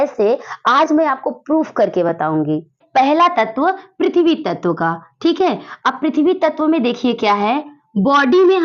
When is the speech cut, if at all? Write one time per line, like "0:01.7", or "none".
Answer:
0:02.7